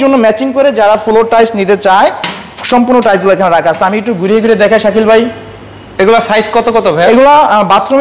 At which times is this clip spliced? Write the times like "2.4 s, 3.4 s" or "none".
none